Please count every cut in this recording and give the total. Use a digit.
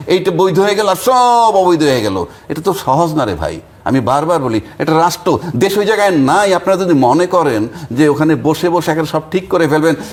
0